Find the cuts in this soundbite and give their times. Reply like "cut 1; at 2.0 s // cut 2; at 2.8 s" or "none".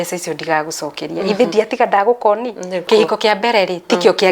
cut 1; at 2.9 s